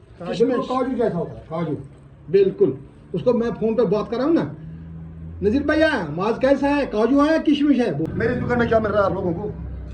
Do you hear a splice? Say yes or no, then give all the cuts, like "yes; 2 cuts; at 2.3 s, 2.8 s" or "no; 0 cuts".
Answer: yes; 1 cut; at 8.1 s